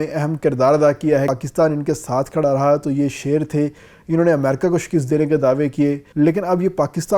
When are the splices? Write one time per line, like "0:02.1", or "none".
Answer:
0:01.3
0:06.0